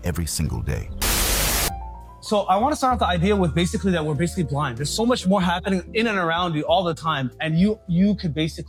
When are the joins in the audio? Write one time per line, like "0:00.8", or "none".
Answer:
none